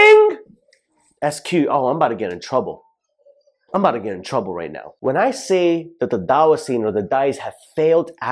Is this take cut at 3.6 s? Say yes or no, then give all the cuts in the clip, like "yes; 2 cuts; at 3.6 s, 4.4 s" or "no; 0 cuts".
no; 1 cut; at 4.8 s